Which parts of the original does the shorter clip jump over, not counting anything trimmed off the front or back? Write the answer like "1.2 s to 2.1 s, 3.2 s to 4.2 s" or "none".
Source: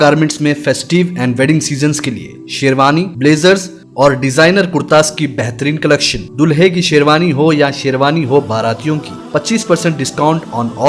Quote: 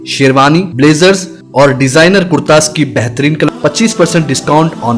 5.9 s to 9.2 s

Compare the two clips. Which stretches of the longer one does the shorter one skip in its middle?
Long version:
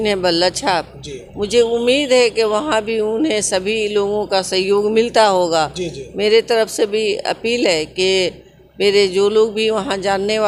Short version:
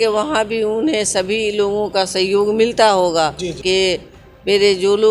5.9 s to 7.9 s

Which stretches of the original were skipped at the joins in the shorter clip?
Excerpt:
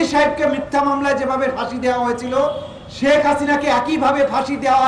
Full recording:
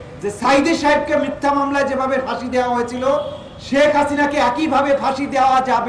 none

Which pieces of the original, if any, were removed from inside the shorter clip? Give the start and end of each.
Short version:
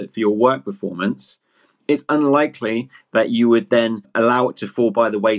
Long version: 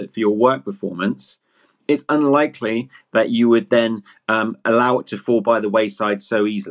4.1 s to 4.6 s

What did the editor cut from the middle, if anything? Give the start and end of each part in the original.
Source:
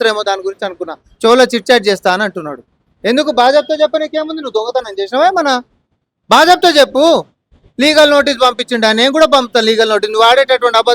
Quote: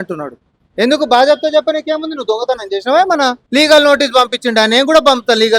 5.7 s to 7.7 s

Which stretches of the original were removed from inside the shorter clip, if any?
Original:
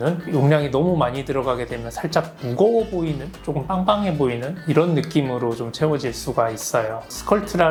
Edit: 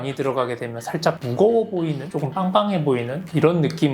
2.3 s to 2.4 s, 3.3 s to 3.4 s

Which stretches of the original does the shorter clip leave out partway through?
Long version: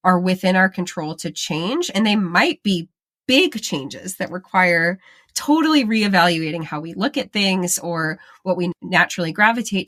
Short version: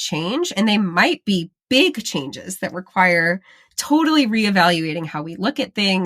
2.9 s to 3.1 s

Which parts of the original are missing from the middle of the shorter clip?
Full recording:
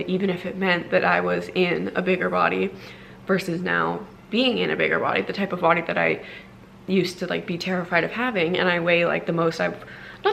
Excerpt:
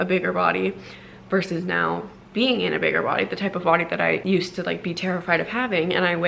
6.2 s to 6.9 s

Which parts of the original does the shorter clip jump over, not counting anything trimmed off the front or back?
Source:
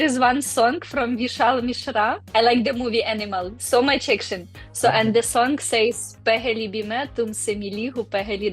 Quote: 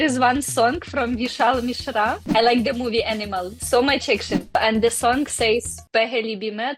4.6 s to 4.9 s

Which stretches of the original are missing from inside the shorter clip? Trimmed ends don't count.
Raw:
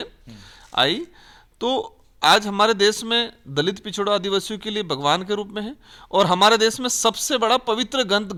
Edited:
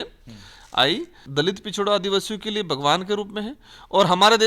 1.2 s to 3.4 s

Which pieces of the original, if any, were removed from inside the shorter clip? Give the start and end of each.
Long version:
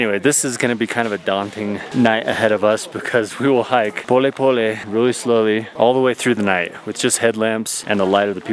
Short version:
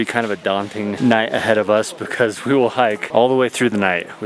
1.8 s to 1.9 s, 4.0 s to 5.7 s

